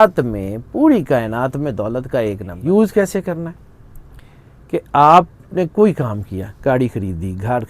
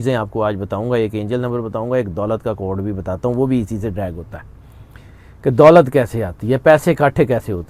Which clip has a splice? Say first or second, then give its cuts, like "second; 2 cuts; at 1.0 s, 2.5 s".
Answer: first; 1 cut; at 2.5 s